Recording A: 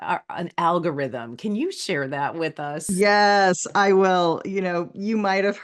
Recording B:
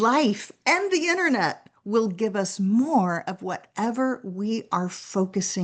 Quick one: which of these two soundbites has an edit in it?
A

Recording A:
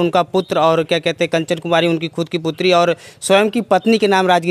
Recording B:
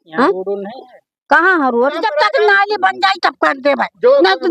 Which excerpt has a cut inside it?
B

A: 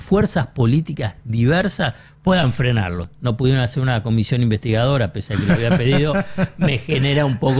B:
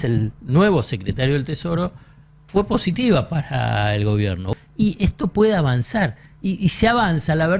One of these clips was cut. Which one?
B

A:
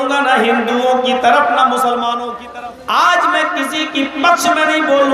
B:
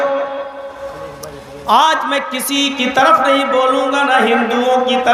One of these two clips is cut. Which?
A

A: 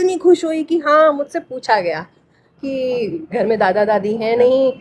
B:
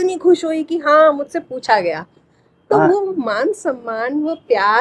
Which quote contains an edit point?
A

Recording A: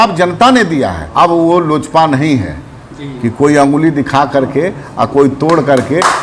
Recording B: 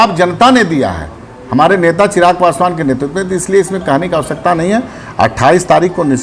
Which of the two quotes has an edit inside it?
A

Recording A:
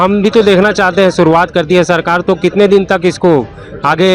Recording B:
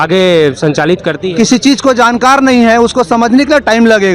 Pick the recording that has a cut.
B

